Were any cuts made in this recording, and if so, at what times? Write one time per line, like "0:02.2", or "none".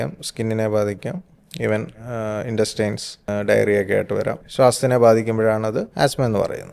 0:03.3
0:04.4
0:05.9